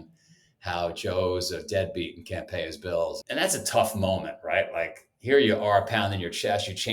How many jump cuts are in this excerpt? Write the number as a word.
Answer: one